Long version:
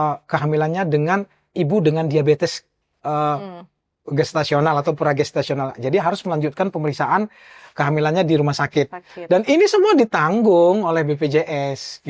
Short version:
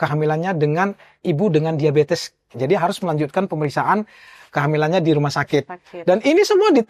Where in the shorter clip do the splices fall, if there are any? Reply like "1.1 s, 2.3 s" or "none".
2.5 s

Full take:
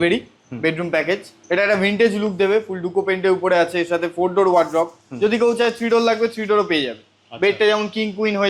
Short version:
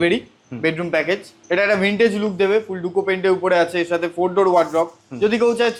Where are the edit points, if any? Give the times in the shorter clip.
none

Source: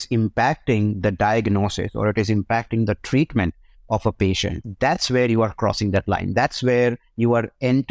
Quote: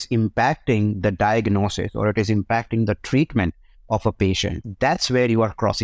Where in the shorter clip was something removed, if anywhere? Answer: none

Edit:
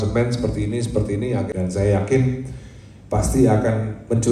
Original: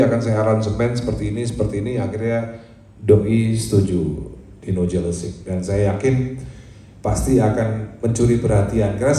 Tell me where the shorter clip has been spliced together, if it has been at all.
1.5 s

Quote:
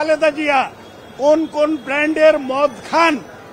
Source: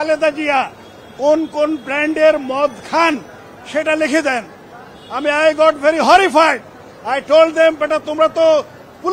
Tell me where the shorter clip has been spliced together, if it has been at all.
none

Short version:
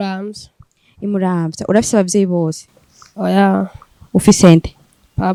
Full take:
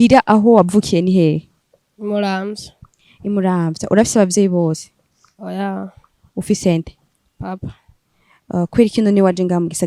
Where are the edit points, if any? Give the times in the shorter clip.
none

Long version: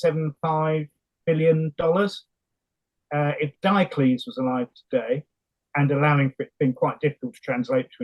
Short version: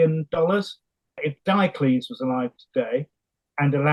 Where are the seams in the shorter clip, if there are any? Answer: 1.2 s

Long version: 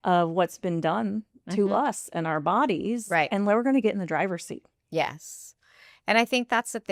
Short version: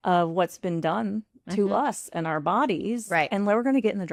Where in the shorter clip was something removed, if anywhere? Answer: none

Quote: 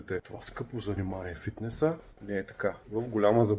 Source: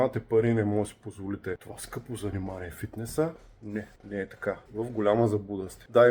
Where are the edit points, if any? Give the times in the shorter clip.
2.1 s

